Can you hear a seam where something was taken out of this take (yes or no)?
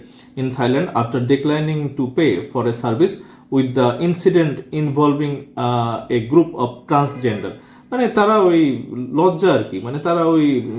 no